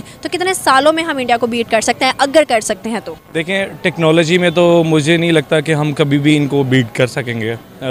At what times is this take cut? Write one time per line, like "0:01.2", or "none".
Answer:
none